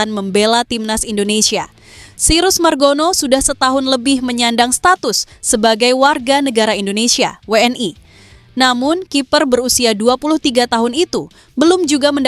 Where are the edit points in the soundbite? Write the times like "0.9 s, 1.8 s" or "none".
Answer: none